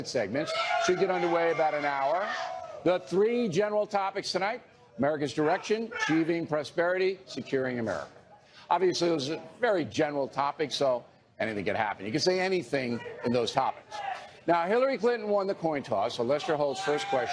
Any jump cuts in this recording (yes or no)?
no